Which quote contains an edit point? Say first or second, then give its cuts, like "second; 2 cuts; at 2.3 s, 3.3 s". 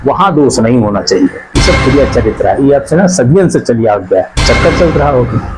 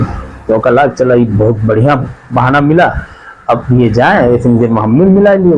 first; 2 cuts; at 1.6 s, 4.4 s